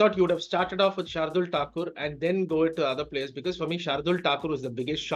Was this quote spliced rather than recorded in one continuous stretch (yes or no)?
no